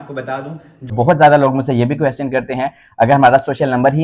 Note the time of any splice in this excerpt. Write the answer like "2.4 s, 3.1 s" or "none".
0.9 s